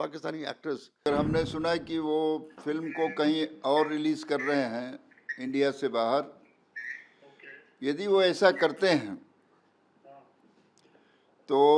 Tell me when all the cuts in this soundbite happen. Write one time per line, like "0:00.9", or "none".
0:01.1